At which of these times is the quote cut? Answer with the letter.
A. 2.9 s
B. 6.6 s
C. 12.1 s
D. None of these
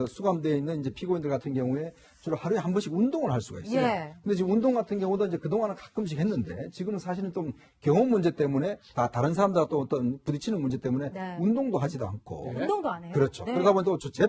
A